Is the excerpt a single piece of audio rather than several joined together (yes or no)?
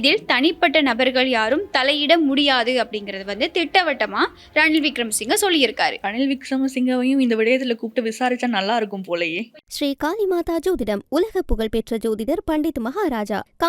no